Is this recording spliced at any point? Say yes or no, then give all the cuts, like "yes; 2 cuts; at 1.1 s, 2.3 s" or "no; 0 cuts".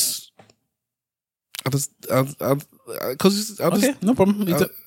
no; 0 cuts